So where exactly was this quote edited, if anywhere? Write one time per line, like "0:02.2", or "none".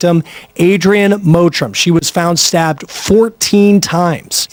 none